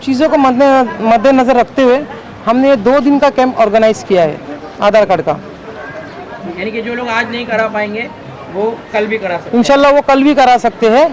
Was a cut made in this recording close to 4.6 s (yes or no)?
no